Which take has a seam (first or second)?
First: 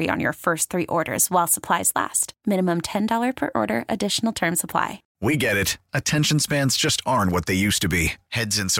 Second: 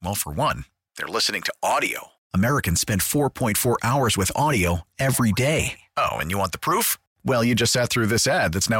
first